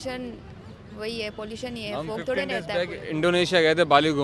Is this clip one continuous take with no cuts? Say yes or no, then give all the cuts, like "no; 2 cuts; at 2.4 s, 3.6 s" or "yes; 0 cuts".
yes; 0 cuts